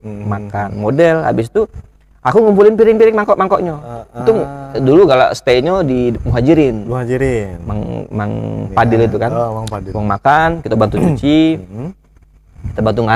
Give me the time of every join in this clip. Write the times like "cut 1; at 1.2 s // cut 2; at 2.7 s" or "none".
none